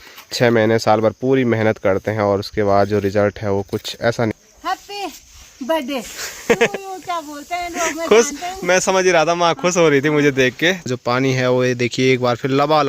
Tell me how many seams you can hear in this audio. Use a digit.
2